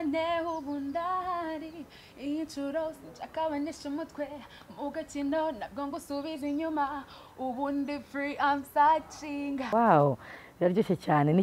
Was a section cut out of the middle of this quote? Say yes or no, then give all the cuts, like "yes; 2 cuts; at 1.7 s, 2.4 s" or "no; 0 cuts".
yes; 1 cut; at 9.7 s